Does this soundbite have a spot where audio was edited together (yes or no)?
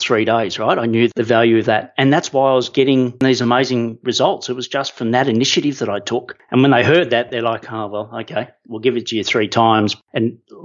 no